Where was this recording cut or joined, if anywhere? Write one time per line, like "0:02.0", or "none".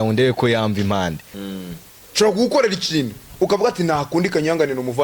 0:01.4